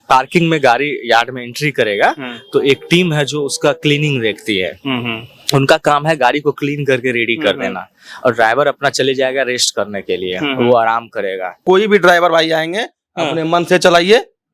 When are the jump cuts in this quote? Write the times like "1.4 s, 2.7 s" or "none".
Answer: 11.6 s